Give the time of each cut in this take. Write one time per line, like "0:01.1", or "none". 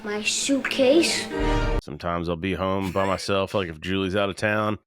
0:01.8